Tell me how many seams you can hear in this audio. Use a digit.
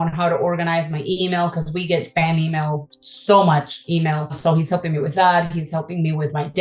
1